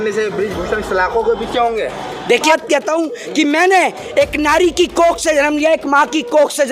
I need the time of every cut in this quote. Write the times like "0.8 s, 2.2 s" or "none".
2.4 s